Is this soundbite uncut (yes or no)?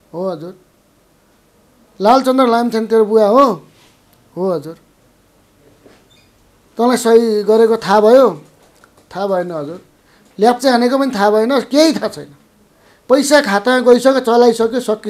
yes